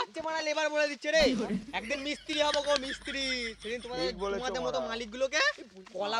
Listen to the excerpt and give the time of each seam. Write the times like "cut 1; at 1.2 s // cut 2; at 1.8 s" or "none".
none